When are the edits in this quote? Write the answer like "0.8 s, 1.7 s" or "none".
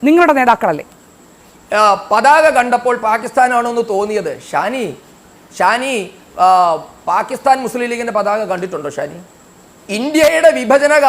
1.3 s